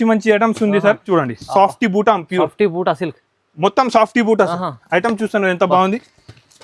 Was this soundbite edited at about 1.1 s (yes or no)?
yes